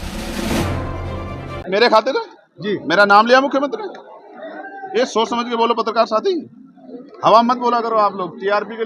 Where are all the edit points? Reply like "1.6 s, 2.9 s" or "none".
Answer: 1.6 s